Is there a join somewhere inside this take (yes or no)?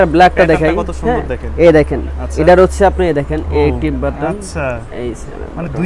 no